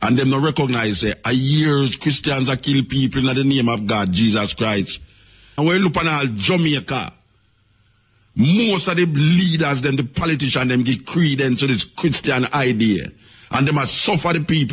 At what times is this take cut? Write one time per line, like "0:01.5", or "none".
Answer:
0:05.6